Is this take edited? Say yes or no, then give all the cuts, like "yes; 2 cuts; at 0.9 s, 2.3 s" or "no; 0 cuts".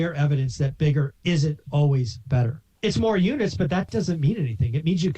yes; 2 cuts; at 2.6 s, 3.9 s